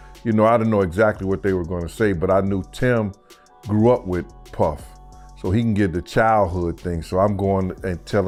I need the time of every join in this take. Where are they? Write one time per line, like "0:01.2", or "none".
none